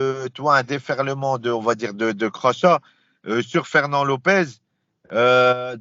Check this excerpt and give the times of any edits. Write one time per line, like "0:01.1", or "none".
none